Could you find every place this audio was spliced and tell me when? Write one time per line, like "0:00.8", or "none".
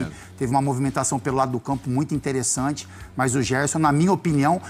none